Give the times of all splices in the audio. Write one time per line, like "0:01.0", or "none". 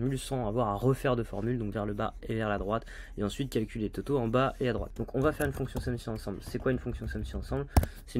0:04.9